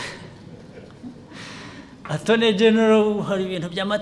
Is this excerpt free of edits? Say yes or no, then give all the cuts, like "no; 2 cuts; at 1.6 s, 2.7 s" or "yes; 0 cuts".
yes; 0 cuts